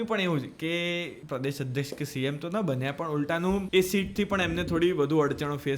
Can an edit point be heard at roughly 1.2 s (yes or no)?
yes